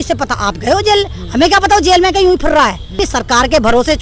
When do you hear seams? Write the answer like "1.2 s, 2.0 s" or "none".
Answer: 3.1 s